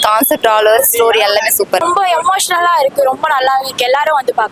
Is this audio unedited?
no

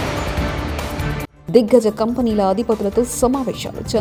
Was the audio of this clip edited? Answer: no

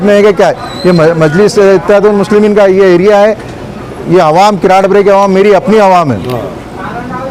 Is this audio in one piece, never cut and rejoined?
yes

